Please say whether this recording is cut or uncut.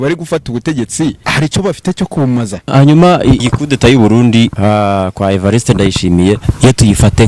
cut